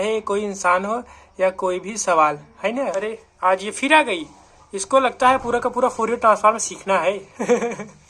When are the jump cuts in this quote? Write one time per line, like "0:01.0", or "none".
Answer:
0:03.0